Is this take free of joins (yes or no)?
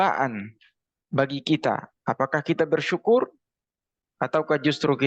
yes